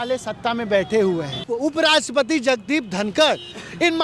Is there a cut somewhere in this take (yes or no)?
yes